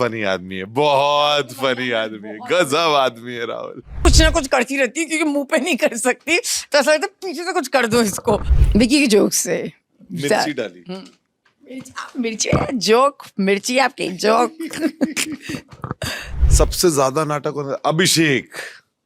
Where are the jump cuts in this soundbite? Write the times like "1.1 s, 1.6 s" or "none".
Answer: 4.1 s, 8.5 s, 16.4 s